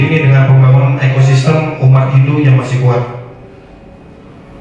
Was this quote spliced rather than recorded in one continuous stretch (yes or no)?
no